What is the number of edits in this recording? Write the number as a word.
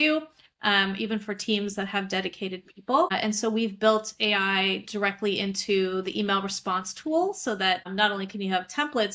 two